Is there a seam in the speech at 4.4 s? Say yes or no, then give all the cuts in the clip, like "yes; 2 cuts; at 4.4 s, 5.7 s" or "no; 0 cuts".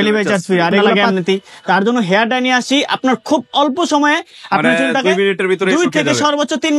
no; 1 cut; at 1.0 s